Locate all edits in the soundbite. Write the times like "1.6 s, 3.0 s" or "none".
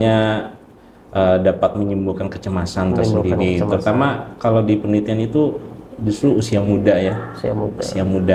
none